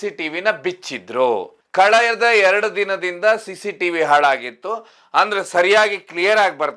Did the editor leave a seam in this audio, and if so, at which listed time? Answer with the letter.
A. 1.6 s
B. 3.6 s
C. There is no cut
A